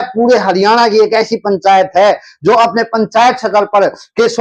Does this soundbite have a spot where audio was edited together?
no; 0 cuts

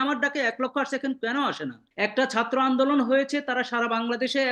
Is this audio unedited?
no; 1 cut; at 1.8 s

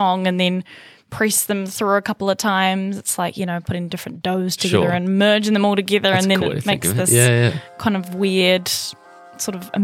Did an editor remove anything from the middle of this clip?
no; 0 cuts

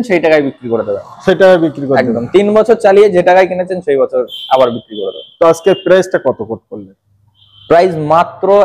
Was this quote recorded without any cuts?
yes; 0 cuts

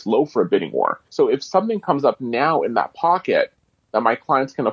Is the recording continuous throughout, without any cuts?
no; 1 cut; at 1.0 s

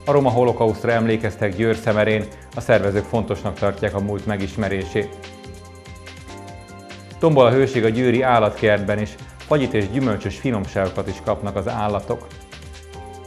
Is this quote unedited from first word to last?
no; 1 cut; at 12.3 s

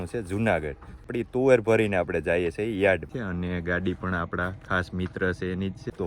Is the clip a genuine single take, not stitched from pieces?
no; 2 cuts; at 1.0 s, 3.1 s

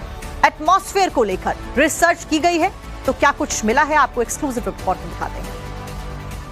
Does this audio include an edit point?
yes; 1 cut; at 2.1 s

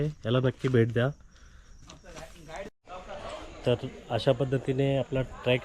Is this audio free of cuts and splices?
no; 1 cut; at 2.7 s

